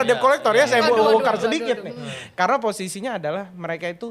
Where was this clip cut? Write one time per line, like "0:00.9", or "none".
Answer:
none